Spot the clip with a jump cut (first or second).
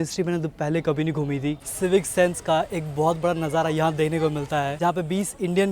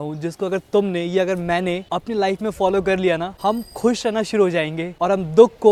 first